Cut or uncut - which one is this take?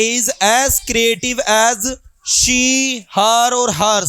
uncut